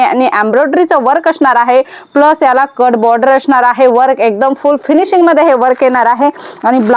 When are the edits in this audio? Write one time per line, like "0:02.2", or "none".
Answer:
none

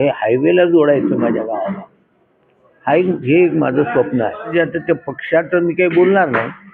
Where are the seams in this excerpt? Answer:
0:04.5

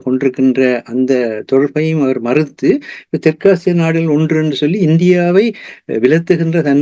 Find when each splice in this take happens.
none

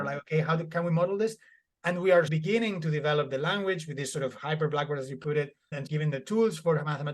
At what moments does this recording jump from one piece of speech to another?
0:02.3
0:05.9

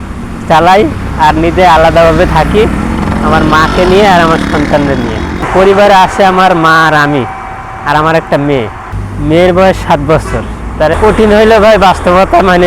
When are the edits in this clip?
0:05.4
0:08.9
0:10.9

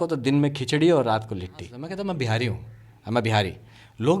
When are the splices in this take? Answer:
0:01.8

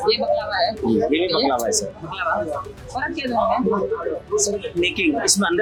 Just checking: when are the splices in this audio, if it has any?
none

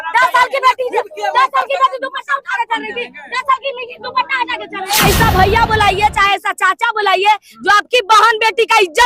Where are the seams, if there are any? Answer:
0:05.0

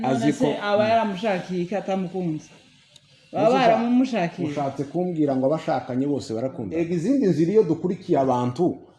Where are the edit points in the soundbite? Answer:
0:06.6

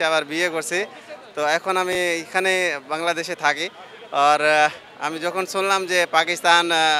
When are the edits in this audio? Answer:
none

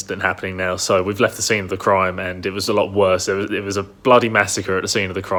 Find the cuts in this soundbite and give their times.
none

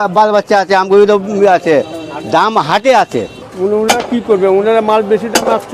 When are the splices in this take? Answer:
0:03.4

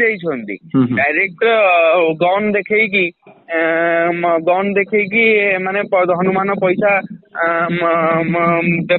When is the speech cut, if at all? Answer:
none

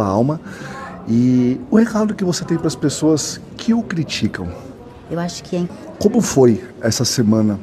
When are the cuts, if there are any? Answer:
0:05.7

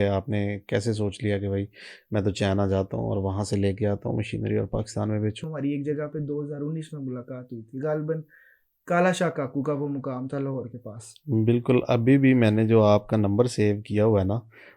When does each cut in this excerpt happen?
0:05.4

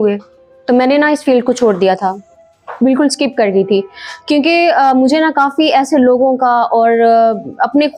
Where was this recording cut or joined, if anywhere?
none

